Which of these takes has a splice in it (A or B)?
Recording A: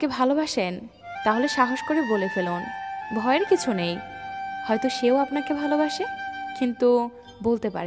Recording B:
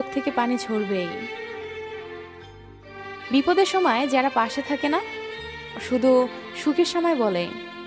B